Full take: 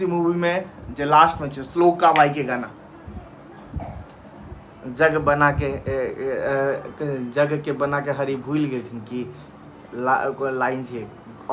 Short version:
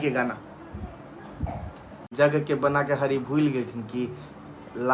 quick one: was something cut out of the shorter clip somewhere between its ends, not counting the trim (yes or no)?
yes